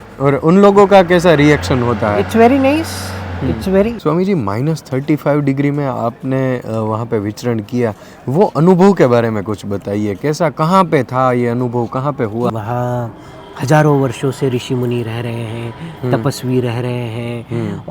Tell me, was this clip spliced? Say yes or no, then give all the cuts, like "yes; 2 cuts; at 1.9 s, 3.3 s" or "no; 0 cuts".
yes; 2 cuts; at 4.0 s, 12.5 s